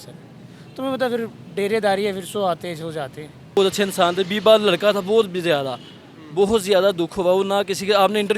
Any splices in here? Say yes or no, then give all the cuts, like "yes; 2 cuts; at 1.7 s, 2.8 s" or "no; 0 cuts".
yes; 1 cut; at 3.6 s